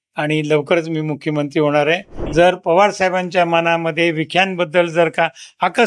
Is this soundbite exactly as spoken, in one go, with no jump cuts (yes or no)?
no